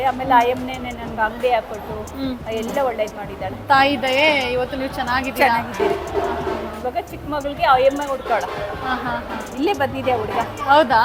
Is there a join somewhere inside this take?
no; 0 cuts

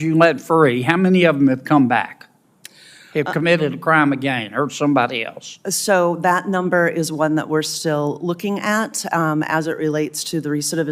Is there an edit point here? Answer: no; 0 cuts

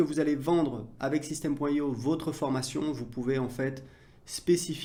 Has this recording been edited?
no; 0 cuts

